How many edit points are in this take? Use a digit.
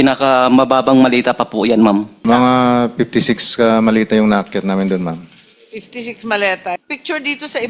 2